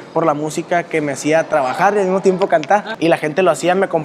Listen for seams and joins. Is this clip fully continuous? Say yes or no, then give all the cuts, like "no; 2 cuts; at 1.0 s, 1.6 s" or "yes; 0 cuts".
no; 1 cut; at 2.9 s